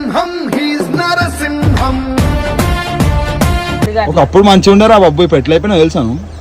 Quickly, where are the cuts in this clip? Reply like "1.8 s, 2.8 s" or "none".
3.9 s